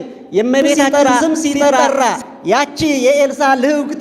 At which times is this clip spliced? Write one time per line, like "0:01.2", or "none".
0:01.8